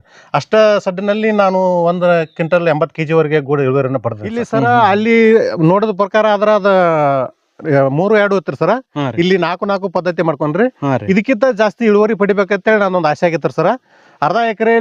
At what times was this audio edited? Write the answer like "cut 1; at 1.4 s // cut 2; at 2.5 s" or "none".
cut 1; at 4.5 s